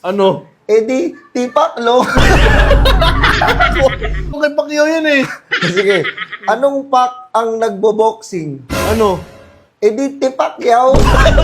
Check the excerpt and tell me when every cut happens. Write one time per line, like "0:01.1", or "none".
0:04.4